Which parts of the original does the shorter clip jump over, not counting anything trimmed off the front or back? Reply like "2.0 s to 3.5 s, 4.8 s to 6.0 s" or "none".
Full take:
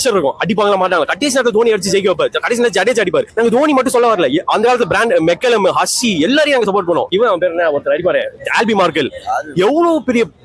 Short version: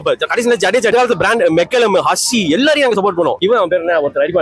3.0 s to 4.6 s

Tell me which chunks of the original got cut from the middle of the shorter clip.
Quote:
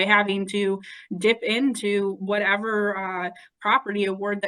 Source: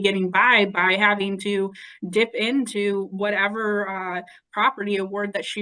none

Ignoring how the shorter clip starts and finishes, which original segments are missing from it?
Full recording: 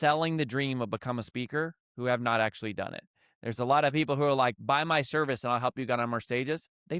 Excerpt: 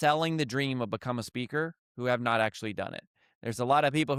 none

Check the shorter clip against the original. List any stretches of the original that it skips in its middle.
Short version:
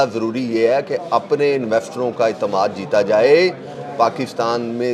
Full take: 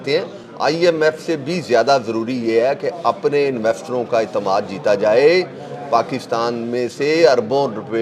none

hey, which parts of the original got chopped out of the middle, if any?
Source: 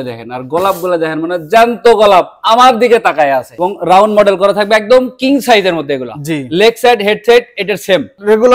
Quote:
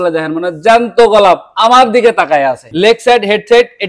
3.5 s to 6.4 s

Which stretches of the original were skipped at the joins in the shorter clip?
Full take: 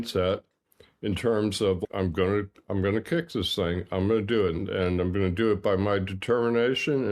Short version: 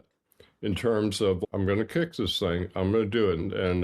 1.9 s to 2.6 s

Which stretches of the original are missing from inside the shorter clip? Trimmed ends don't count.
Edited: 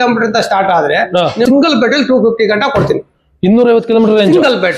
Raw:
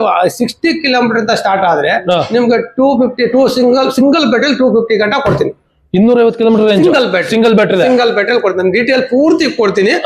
2.4 s to 4.0 s

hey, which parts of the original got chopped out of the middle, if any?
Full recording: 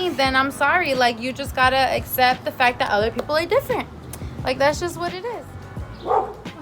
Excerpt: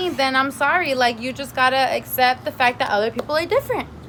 none

